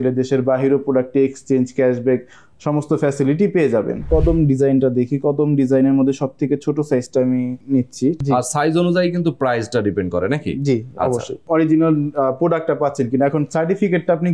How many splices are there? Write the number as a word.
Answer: three